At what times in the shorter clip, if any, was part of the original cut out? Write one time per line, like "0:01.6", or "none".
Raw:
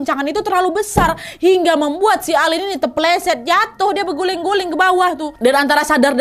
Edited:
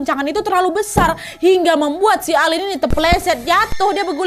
none